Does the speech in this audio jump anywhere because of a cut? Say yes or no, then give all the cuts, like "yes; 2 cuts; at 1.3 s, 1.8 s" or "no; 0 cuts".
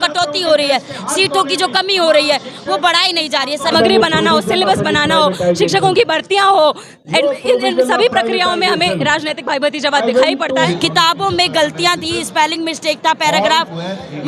yes; 2 cuts; at 3.7 s, 10.7 s